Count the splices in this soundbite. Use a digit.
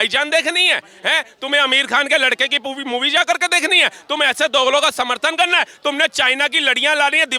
0